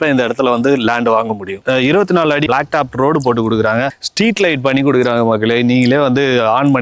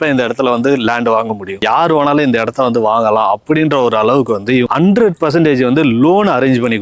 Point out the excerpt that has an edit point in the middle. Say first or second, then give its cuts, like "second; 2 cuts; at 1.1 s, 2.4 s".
second; 2 cuts; at 1.6 s, 4.7 s